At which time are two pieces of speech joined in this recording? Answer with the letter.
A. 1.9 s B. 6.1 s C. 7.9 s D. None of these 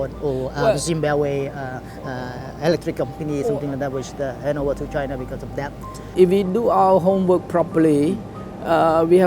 B